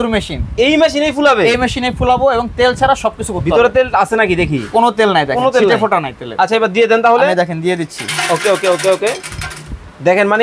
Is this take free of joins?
yes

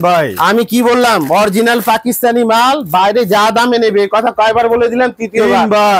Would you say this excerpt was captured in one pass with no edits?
yes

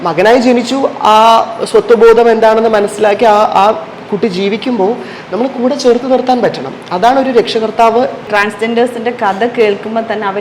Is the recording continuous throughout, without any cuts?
no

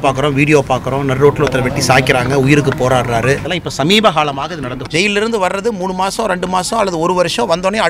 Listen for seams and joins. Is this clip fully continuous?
no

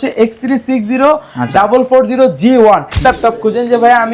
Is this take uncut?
no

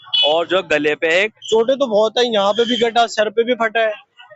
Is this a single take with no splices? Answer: no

